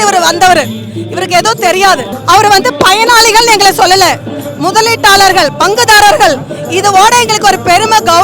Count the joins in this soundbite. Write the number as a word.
one